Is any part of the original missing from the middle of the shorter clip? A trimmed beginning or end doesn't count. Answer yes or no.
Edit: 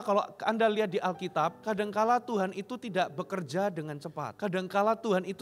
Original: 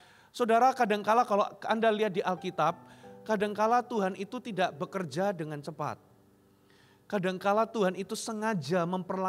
yes